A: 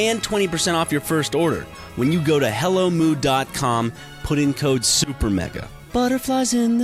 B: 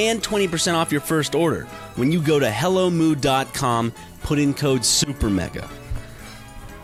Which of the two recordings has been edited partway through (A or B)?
A